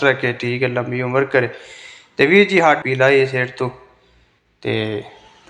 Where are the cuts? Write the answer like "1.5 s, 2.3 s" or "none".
2.8 s

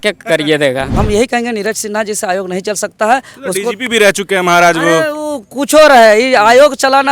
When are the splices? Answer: 0.9 s

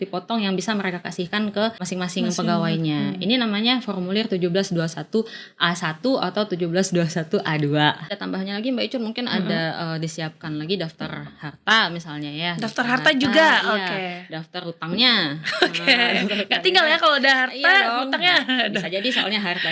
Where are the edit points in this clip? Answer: 1.8 s, 8.1 s

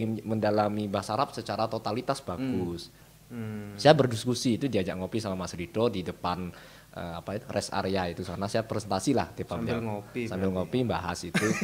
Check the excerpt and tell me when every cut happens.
3.1 s

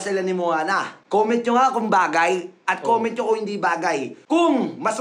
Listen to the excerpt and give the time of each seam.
0.9 s, 4.1 s

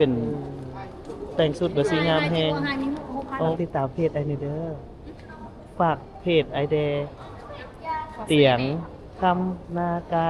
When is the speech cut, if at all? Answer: 3.6 s

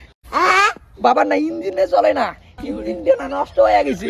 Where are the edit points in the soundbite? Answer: none

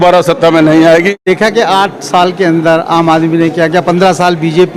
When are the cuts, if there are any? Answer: 1.3 s

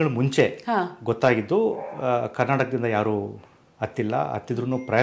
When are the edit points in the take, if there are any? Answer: none

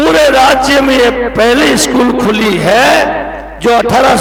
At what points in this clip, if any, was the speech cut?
none

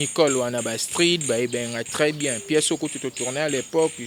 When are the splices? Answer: none

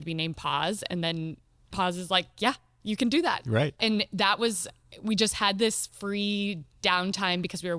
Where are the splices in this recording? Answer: 1.7 s, 3.8 s

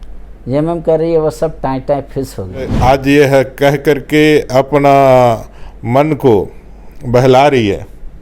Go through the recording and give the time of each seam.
2.7 s

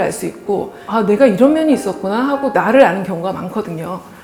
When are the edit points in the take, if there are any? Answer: none

